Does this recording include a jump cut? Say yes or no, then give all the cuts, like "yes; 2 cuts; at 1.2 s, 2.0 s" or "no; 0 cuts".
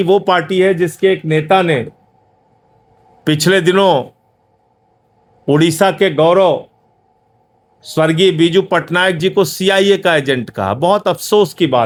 no; 0 cuts